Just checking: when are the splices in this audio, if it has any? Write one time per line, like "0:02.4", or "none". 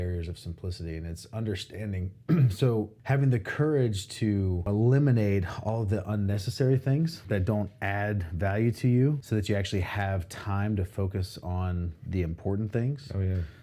0:03.0
0:04.7
0:07.2
0:09.2